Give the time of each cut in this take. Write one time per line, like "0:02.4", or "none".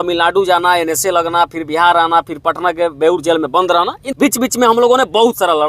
0:04.0